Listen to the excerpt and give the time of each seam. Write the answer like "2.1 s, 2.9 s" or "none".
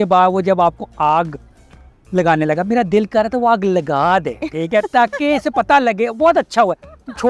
none